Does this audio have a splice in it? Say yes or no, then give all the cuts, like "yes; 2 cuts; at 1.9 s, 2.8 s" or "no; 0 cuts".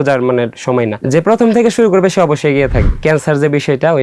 yes; 2 cuts; at 1.0 s, 2.9 s